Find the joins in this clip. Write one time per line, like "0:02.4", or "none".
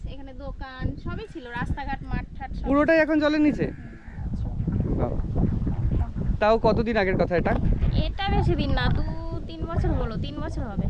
none